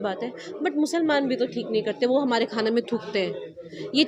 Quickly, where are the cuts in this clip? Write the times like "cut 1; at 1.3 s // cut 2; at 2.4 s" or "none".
none

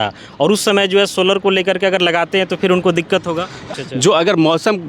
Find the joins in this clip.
cut 1; at 3.6 s

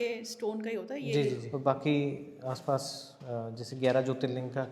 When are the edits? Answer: cut 1; at 1.5 s

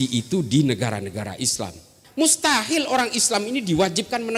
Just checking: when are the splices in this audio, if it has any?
cut 1; at 2.0 s

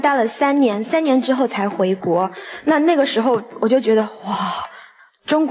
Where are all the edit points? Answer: none

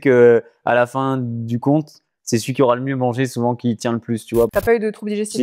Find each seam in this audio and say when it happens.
cut 1; at 4.5 s

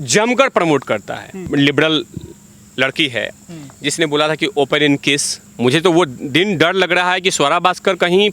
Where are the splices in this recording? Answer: cut 1; at 1.5 s // cut 2; at 5.4 s

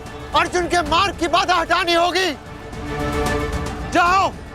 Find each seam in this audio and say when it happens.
cut 1; at 2.9 s

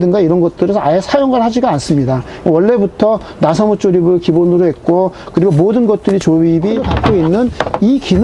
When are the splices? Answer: cut 1; at 6.9 s

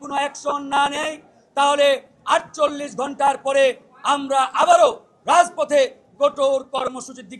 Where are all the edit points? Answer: none

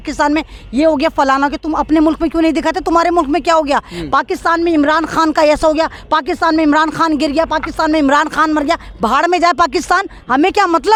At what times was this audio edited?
none

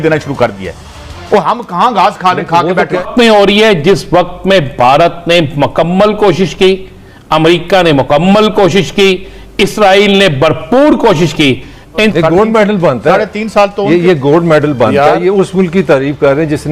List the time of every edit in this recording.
cut 1; at 3.0 s // cut 2; at 12.1 s

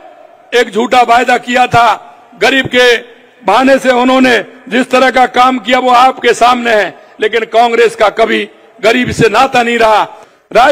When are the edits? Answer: none

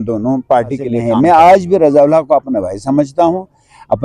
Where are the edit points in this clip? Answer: cut 1; at 0.9 s

